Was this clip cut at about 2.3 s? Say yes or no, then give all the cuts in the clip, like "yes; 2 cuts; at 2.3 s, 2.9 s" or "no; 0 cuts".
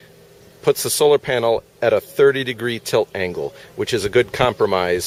no; 0 cuts